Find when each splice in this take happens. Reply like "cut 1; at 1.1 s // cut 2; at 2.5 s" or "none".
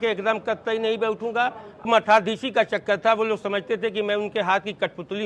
cut 1; at 1.9 s